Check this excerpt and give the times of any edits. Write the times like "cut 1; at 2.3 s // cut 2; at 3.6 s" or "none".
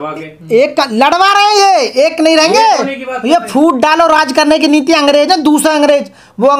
none